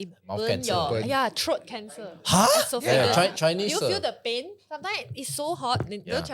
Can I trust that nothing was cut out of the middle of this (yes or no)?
yes